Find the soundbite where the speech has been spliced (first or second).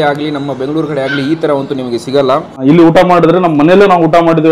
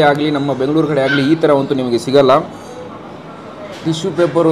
first